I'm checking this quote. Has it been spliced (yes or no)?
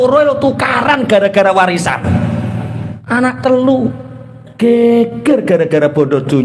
yes